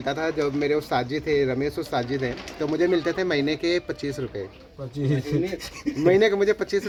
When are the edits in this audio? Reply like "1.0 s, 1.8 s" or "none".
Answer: none